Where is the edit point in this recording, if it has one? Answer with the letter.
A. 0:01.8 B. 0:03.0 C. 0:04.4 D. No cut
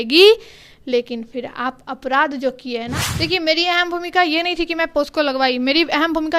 B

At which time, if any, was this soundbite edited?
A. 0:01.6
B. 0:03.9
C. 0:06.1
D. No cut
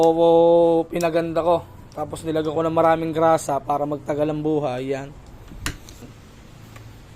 C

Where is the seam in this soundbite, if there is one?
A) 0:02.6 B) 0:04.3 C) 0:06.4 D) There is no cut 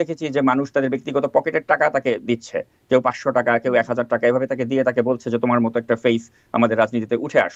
D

